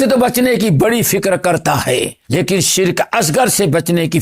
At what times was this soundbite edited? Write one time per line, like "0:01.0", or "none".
0:01.8